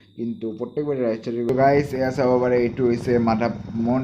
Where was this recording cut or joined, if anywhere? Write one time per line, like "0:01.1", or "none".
0:01.5